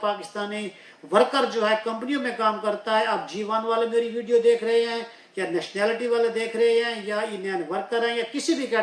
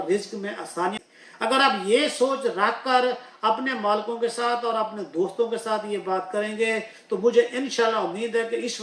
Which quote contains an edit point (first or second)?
second